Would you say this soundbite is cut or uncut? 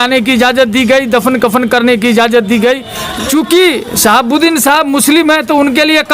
cut